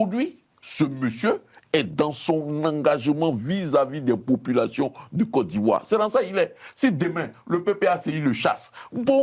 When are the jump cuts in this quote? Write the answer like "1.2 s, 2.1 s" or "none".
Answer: none